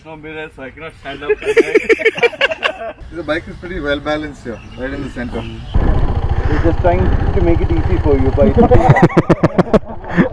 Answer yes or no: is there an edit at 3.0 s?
yes